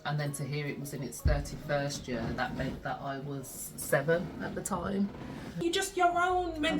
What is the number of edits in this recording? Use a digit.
1